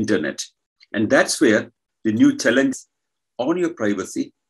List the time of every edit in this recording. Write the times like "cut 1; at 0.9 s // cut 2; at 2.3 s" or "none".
cut 1; at 2.7 s